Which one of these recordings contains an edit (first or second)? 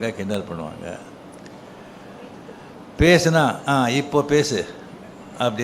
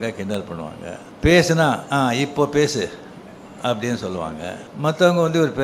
second